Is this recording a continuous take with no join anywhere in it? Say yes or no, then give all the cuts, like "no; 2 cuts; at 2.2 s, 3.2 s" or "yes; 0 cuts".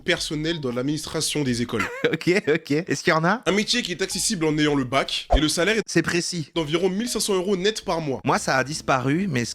no; 1 cut; at 8.2 s